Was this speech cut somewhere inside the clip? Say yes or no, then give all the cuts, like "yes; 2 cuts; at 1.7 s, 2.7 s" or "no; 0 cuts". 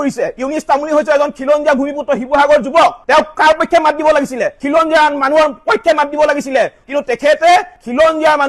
yes; 2 cuts; at 4.6 s, 6.8 s